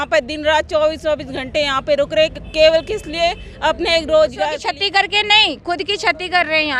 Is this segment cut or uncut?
cut